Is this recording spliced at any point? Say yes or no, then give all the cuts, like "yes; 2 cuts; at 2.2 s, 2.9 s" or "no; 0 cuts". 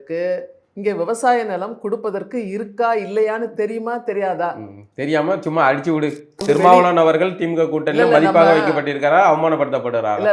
yes; 1 cut; at 6.4 s